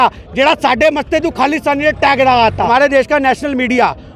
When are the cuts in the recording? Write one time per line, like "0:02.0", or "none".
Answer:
0:02.6